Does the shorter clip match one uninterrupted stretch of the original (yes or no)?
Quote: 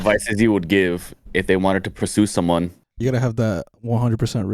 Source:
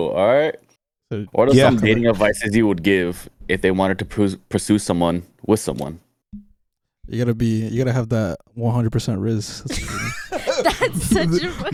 no